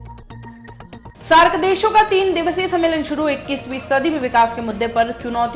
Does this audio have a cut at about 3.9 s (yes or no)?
no